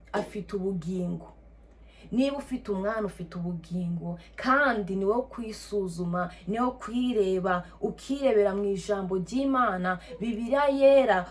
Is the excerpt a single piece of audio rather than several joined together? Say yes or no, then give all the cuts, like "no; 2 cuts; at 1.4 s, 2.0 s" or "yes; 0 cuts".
yes; 0 cuts